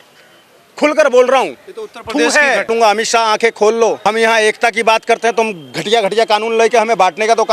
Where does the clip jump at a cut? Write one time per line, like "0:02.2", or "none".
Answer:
0:02.7
0:04.0